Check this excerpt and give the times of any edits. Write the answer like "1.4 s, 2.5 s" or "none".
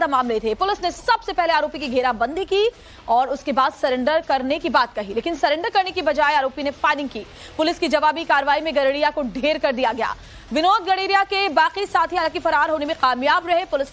1.3 s

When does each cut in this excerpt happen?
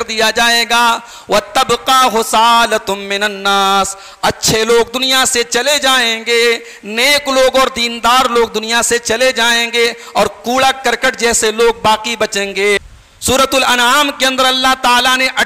13.0 s

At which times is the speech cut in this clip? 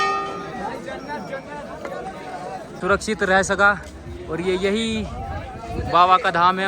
2.7 s

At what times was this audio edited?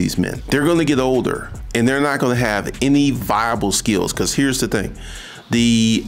none

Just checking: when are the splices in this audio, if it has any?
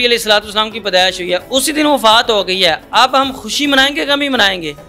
none

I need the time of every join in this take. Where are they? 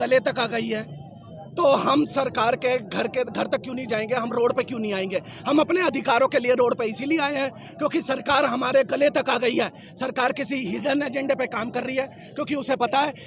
none

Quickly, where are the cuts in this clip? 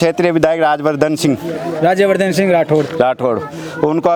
none

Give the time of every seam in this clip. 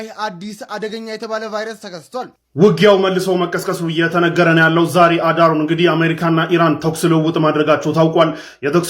2.4 s

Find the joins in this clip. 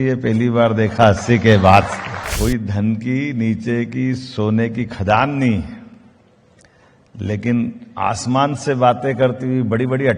2.2 s

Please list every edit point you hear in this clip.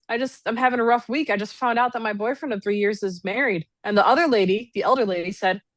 3.7 s

